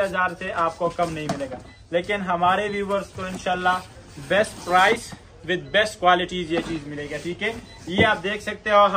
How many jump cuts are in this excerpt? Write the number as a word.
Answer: zero